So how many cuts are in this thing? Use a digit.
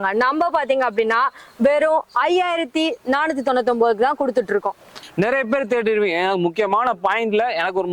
1